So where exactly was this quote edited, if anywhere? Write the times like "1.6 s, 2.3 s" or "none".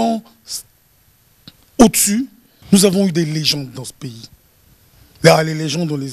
2.5 s